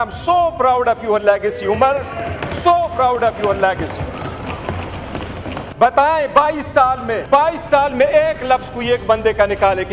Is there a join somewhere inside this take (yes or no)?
yes